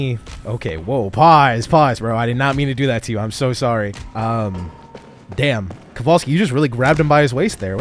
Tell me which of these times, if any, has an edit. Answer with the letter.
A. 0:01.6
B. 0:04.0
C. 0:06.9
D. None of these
B